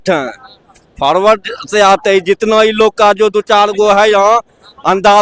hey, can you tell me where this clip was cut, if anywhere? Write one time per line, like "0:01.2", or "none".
none